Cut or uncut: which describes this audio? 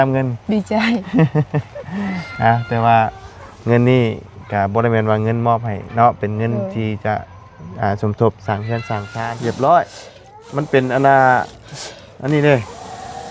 cut